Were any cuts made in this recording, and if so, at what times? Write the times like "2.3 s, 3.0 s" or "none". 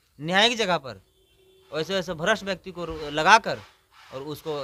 none